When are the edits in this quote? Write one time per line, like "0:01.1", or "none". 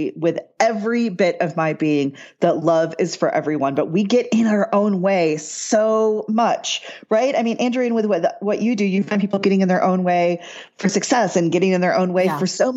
none